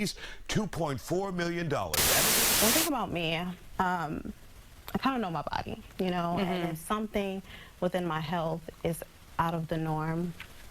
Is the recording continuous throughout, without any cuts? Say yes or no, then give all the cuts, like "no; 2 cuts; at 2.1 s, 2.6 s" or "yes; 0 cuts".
no; 1 cut; at 2.3 s